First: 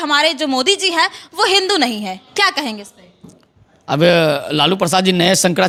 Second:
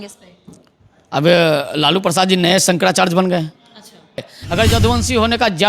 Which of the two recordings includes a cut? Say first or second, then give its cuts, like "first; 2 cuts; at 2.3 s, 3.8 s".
second; 1 cut; at 4.3 s